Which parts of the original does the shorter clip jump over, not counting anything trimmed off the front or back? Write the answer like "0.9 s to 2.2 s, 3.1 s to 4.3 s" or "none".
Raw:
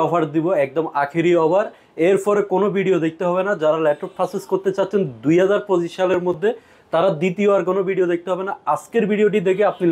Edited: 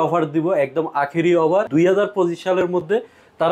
1.7 s to 5.2 s